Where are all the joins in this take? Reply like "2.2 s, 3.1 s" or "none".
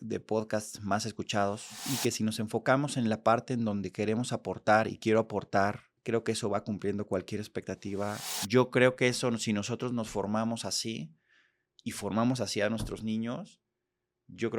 1.8 s, 5.9 s, 8.3 s